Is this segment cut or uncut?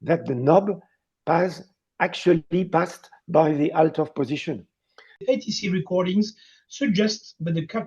cut